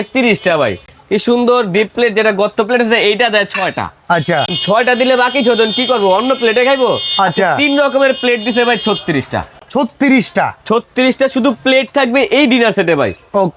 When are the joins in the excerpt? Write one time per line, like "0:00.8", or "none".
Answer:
none